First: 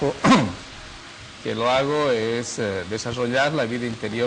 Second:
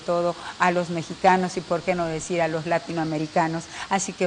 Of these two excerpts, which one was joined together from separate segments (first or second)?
first